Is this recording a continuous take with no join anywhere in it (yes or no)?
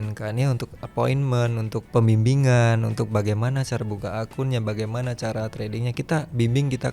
no